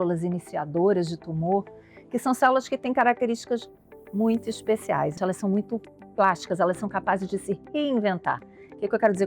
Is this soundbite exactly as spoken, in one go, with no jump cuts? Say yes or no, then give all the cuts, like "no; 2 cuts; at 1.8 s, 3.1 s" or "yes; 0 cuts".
no; 1 cut; at 5.2 s